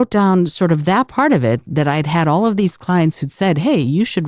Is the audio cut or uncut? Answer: cut